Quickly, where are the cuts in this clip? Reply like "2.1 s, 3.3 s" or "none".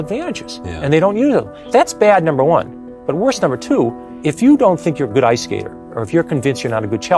1.6 s, 4.1 s